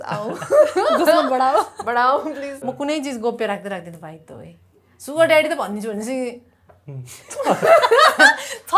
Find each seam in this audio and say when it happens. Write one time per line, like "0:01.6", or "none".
0:02.5